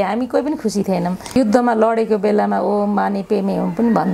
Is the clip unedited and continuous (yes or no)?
no